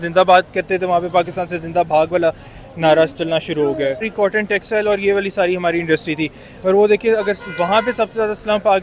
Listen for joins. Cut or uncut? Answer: cut